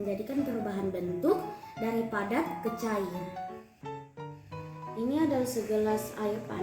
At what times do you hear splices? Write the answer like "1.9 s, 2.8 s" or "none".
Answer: 3.2 s, 5.0 s